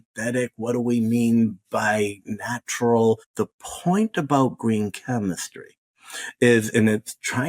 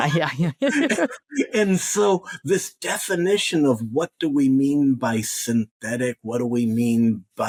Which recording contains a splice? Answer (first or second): first